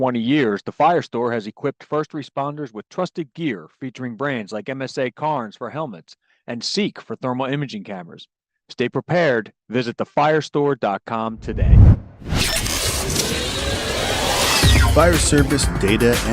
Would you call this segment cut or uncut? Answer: cut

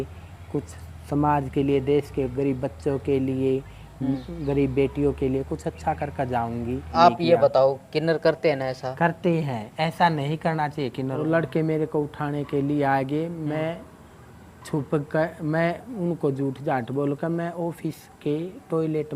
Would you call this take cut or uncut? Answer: cut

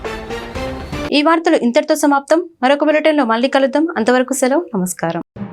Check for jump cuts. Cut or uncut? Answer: uncut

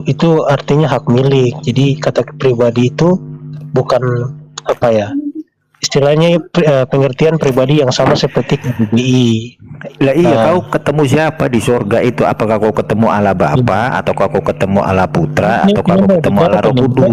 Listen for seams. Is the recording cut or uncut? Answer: uncut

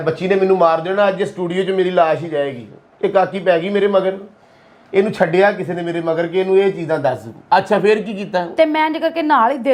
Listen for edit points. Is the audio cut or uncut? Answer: uncut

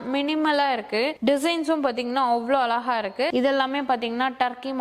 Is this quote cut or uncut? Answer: cut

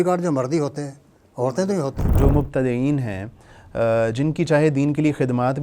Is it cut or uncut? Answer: cut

